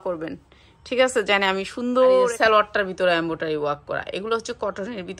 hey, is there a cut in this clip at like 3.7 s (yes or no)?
no